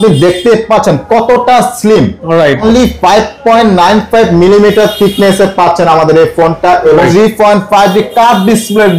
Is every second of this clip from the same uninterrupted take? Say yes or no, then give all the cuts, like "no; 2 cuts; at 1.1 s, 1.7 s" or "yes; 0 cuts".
no; 2 cuts; at 2.6 s, 7.1 s